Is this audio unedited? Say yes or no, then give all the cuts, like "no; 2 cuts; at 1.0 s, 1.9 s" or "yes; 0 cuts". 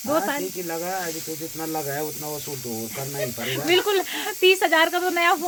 yes; 0 cuts